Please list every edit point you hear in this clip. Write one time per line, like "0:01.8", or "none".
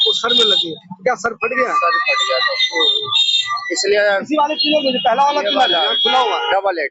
none